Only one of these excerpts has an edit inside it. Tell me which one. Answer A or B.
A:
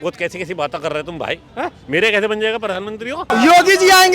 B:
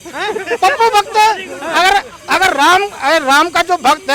A